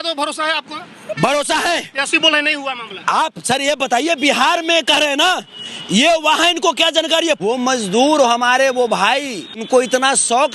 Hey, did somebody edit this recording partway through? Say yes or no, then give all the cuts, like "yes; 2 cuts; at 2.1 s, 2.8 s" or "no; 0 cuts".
yes; 2 cuts; at 7.5 s, 9.6 s